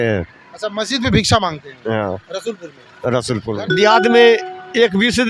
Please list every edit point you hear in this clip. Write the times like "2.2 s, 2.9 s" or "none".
3.6 s